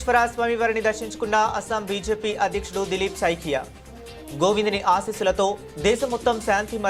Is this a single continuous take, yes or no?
yes